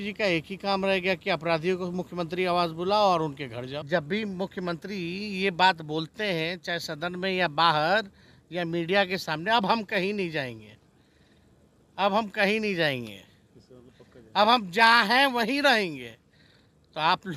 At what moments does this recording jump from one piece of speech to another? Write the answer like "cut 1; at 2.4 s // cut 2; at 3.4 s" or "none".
cut 1; at 3.8 s